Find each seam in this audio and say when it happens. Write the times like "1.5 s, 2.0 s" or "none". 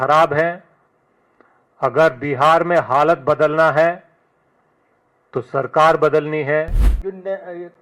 6.8 s